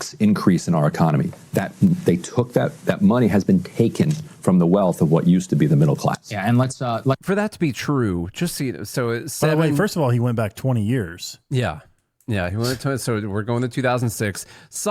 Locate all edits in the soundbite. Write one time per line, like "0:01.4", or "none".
none